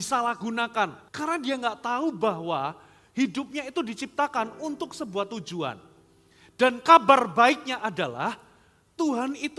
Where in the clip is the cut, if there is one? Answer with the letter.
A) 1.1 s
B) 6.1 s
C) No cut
A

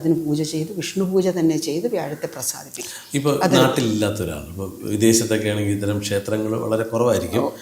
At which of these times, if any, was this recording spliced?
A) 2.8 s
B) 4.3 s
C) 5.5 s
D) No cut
D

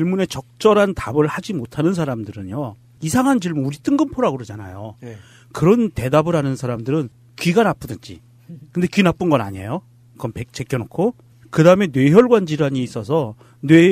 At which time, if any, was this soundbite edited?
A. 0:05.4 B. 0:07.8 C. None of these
B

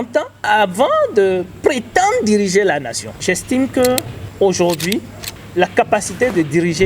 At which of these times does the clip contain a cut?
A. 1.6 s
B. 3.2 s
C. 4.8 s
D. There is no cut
B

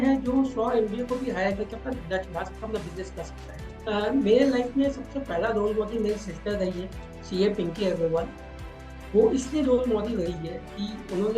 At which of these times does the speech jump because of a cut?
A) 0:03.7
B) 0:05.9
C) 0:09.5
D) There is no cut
A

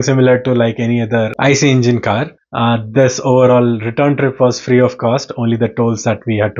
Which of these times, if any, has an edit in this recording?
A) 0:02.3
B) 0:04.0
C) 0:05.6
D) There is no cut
A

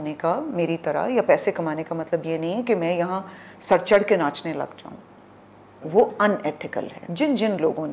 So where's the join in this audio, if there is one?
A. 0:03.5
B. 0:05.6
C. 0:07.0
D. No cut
C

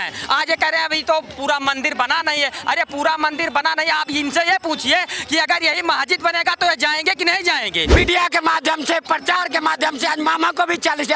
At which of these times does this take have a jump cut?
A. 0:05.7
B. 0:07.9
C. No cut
B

